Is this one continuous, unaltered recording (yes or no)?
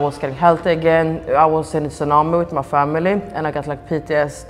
yes